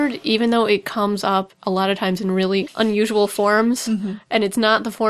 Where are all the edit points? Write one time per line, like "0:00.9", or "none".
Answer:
0:02.7